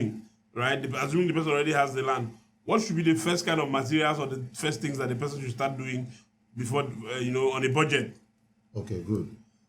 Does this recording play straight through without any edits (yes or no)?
yes